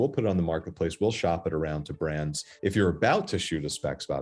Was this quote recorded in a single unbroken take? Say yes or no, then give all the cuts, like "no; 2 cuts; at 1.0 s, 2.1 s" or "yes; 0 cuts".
no; 1 cut; at 2.5 s